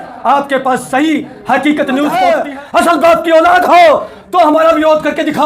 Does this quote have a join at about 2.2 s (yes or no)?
yes